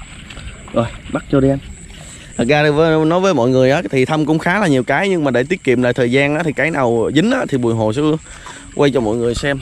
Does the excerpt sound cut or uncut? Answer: uncut